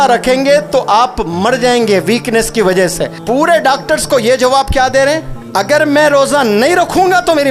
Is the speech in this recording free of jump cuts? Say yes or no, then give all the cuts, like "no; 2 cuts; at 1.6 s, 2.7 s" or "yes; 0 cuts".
no; 2 cuts; at 3.1 s, 5.3 s